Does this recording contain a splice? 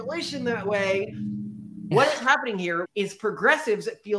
yes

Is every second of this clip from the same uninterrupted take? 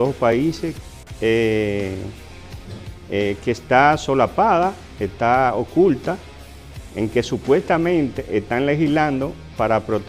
yes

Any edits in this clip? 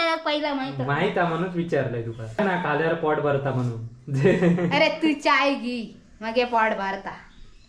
no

